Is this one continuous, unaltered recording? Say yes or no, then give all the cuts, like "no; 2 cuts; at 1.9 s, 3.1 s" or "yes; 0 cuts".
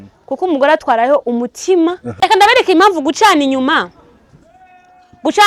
no; 1 cut; at 2.1 s